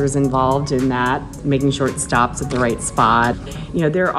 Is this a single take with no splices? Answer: no; 2 cuts; at 1.4 s, 3.4 s

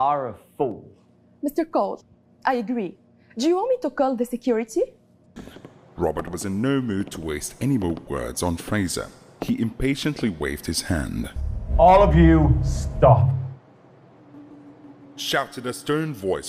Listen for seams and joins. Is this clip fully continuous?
no; 2 cuts; at 5.4 s, 11.4 s

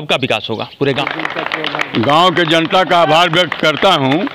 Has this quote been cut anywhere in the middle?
yes; 1 cut; at 1.0 s

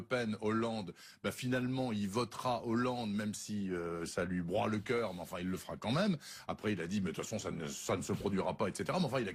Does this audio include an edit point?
yes; 1 cut; at 3.4 s

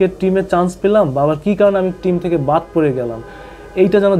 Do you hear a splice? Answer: no; 0 cuts

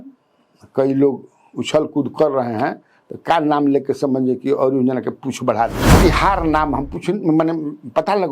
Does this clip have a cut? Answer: yes; 1 cut; at 6.0 s

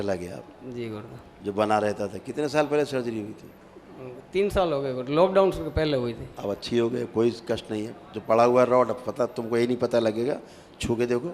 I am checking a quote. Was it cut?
no; 0 cuts

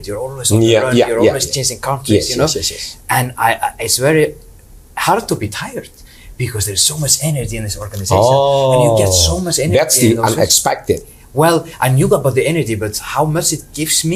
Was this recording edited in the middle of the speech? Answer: no; 0 cuts

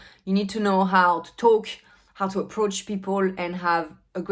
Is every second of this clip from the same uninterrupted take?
yes; 0 cuts

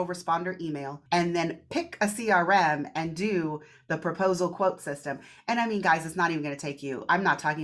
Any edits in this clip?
yes; 1 cut; at 0.9 s

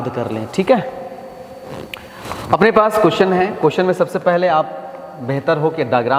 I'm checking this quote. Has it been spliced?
no; 0 cuts

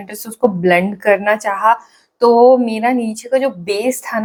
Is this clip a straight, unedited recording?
yes; 0 cuts

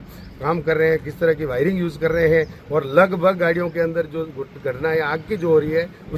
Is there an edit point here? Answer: no; 0 cuts

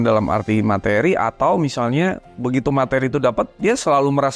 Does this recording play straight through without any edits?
yes; 0 cuts

